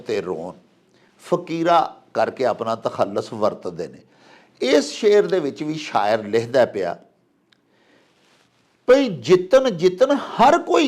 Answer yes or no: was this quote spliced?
no